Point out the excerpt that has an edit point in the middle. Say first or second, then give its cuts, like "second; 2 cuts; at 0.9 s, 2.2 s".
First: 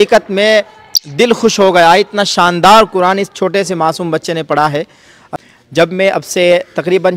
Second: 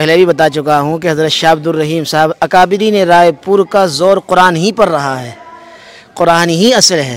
first; 1 cut; at 5.3 s